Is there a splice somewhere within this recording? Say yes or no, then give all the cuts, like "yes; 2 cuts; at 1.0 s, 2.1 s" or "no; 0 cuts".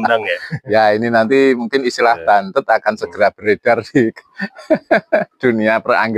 no; 0 cuts